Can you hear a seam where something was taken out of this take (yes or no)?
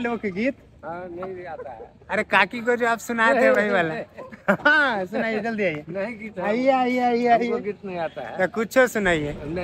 no